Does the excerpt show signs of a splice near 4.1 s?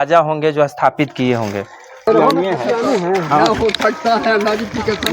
no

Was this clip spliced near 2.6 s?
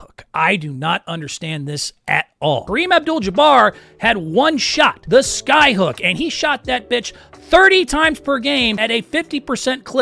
yes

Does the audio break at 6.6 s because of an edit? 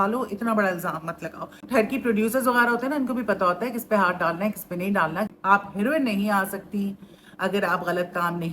no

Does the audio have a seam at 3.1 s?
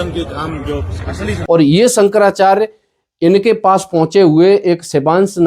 no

